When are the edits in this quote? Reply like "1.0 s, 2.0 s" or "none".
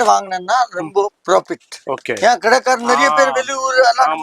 none